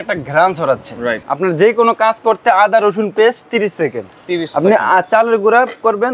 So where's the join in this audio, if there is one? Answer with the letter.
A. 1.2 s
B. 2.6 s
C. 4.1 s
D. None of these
A